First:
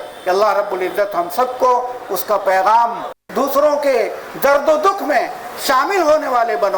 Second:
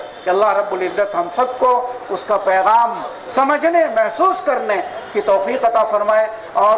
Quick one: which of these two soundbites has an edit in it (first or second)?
first